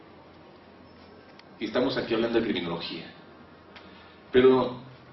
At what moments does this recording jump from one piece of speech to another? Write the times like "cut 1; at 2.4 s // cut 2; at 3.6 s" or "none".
cut 1; at 2.5 s